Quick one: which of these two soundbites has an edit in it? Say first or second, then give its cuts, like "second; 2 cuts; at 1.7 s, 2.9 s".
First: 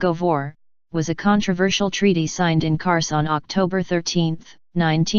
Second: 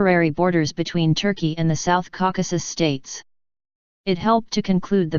first; 1 cut; at 2.5 s